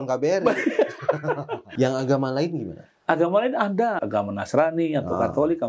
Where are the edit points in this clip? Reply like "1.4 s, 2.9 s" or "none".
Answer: 1.7 s, 4.0 s